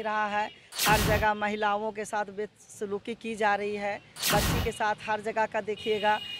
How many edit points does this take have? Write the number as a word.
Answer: one